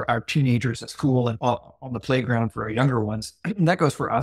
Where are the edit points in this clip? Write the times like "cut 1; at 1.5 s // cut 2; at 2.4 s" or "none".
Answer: cut 1; at 1.4 s